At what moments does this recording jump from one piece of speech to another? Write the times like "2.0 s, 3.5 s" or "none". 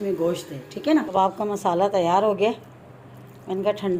1.1 s